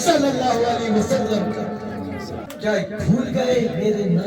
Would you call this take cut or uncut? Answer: cut